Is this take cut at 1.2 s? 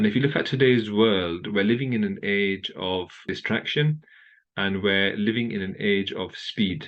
no; 1 cut; at 3.3 s

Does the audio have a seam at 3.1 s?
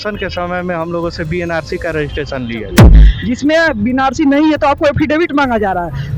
yes; 1 cut; at 3.1 s

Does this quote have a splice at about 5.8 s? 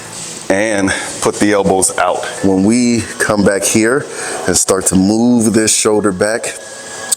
no; 1 cut; at 2.3 s

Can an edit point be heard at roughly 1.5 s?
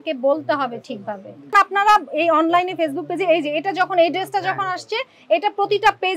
yes; 1 cut; at 1.5 s

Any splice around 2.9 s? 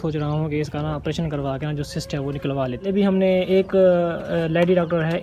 yes; 1 cut; at 2.9 s

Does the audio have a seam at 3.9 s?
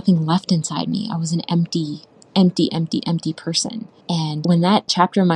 yes; 1 cut; at 3.9 s

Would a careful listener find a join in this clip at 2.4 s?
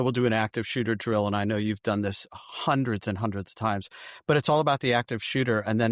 no; 0 cuts

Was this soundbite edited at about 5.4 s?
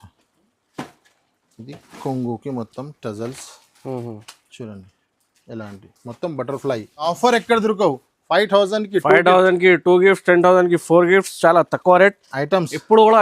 no; 1 cut; at 7.1 s

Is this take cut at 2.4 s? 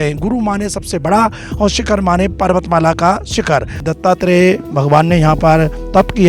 no; 1 cut; at 3.9 s

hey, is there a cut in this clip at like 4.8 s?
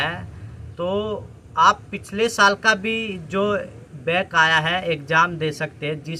no; 0 cuts

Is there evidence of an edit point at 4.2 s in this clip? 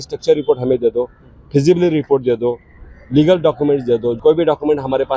yes; 1 cut; at 4.2 s

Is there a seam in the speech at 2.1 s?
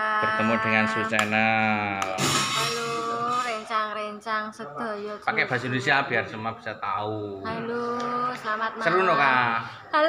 yes; 1 cut; at 2.1 s

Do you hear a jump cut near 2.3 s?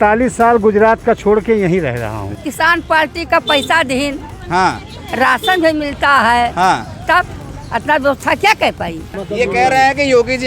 yes; 2 cuts; at 2.3 s, 9.2 s

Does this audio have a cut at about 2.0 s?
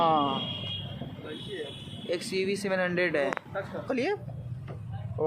no; 1 cut; at 3.8 s

